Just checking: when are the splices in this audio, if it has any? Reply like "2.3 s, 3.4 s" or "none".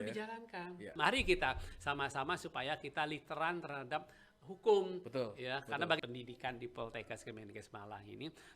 0.9 s, 6.0 s